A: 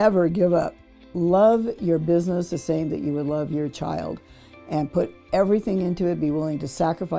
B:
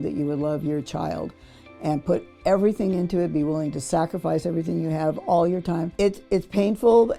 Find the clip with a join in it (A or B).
B